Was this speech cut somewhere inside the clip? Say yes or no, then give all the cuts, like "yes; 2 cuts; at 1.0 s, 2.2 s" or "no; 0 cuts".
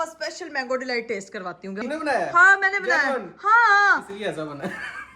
yes; 1 cut; at 1.8 s